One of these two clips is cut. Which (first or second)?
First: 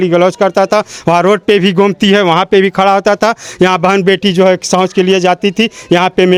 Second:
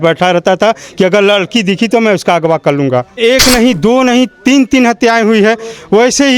second